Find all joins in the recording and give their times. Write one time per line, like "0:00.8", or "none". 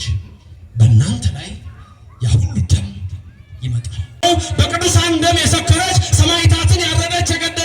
0:04.2